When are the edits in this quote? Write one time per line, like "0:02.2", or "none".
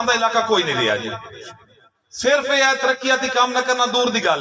none